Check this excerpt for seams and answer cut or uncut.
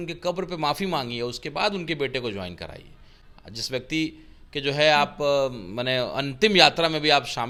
uncut